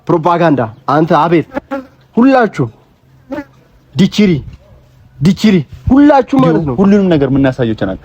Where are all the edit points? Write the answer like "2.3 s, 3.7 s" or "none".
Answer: 6.7 s